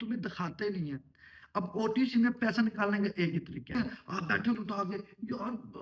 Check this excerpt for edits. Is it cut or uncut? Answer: cut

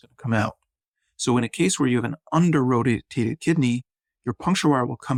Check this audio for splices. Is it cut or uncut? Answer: uncut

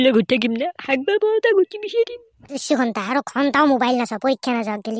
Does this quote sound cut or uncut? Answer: cut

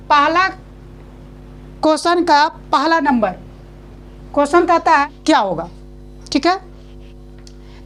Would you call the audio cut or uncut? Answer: cut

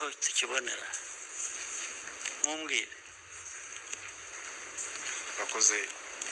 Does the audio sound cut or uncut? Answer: cut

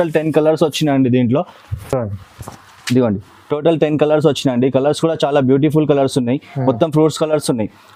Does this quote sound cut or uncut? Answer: uncut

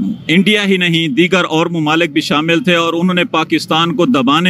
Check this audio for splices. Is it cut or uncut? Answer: cut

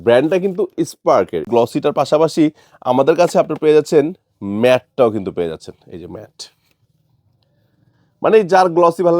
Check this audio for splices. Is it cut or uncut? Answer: cut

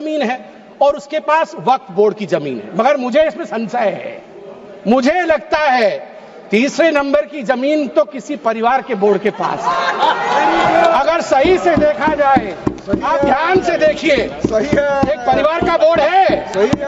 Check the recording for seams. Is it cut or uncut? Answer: uncut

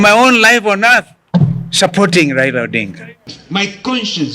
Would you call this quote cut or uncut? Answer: cut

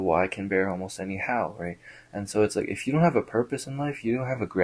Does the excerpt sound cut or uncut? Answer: uncut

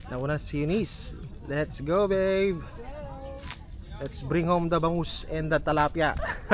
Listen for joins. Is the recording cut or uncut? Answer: uncut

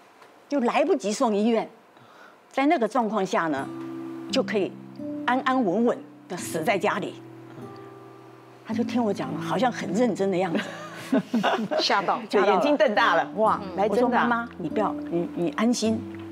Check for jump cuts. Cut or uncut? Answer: uncut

